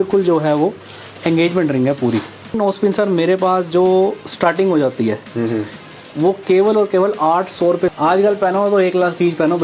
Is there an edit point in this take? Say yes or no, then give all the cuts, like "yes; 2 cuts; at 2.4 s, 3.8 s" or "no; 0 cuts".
yes; 2 cuts; at 2.6 s, 7.9 s